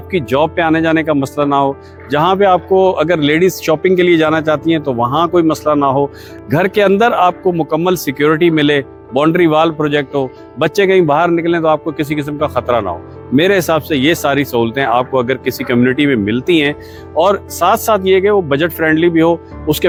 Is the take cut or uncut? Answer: uncut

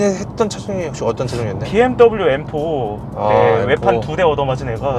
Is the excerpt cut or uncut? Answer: uncut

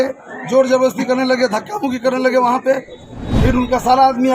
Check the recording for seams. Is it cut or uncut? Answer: uncut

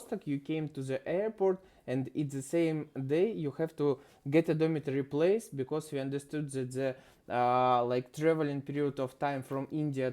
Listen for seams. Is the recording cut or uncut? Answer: uncut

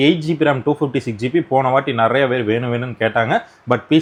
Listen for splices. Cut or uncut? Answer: uncut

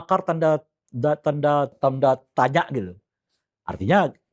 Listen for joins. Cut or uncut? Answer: cut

